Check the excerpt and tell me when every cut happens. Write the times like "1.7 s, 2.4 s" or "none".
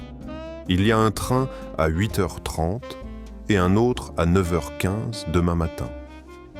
none